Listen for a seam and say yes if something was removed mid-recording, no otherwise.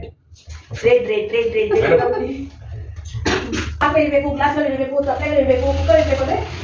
yes